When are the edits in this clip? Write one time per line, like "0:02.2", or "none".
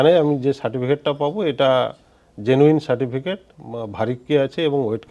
0:03.5